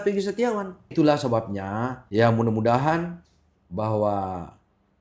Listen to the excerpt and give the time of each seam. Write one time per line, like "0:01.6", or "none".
0:00.9
0:02.0